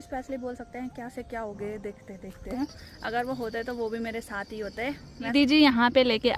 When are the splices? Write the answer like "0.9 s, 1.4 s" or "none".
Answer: 2.6 s, 5.3 s